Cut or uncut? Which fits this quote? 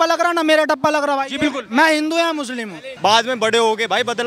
cut